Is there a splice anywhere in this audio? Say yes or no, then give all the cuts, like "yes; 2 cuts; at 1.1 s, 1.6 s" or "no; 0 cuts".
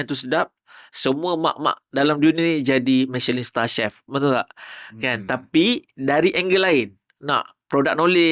no; 0 cuts